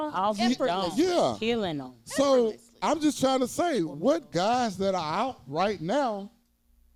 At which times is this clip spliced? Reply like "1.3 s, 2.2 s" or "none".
none